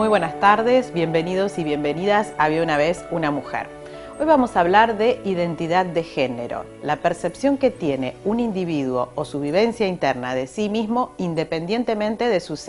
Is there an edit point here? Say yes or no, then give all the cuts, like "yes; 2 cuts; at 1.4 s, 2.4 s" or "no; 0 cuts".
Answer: no; 0 cuts